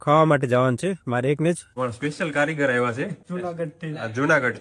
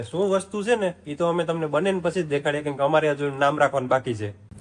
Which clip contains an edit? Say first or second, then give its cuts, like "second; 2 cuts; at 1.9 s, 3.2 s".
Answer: first; 2 cuts; at 1.7 s, 3.2 s